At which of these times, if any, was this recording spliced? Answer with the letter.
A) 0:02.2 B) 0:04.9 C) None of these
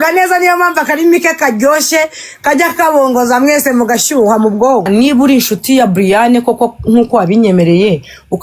B